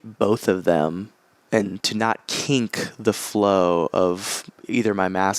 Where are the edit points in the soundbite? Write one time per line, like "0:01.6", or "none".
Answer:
0:01.8

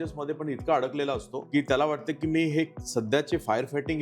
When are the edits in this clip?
0:01.3

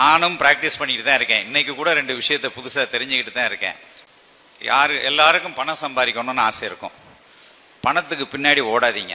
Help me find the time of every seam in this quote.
0:03.9

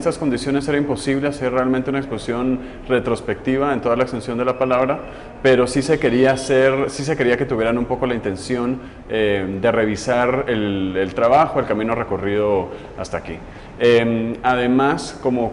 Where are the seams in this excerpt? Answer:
none

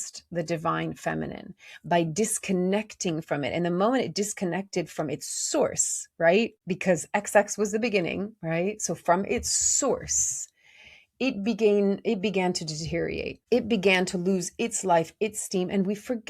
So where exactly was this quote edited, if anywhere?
0:06.6
0:13.3

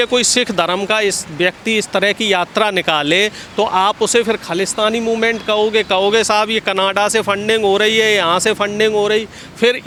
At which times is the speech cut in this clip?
none

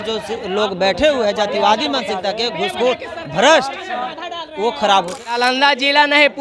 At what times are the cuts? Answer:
0:05.4

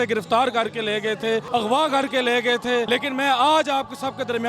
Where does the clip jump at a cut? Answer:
0:01.5
0:02.9

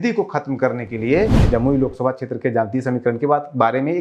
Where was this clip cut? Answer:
0:01.4

